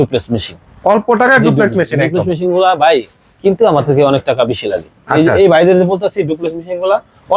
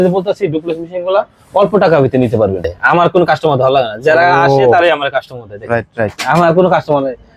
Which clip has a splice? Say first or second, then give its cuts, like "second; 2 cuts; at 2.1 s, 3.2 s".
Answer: second; 1 cut; at 2.7 s